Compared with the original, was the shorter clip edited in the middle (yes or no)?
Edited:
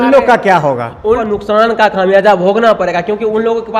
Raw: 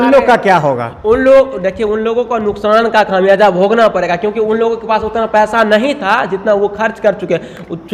yes